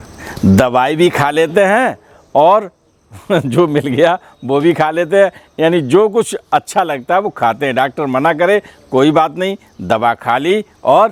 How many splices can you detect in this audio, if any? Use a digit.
0